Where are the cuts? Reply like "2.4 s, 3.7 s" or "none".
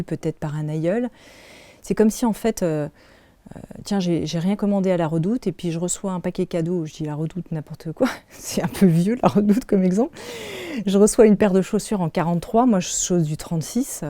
none